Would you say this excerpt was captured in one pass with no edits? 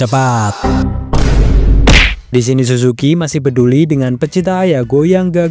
no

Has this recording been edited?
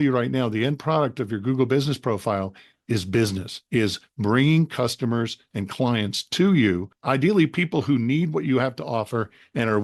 yes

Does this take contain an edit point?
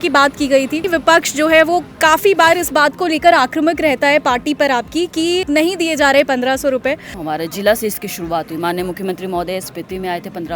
yes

